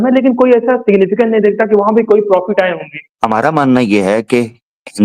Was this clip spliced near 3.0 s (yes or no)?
yes